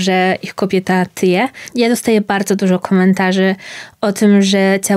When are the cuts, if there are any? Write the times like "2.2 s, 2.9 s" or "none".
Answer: 1.7 s